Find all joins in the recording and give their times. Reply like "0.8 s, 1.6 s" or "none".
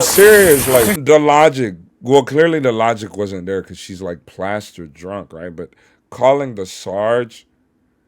1.0 s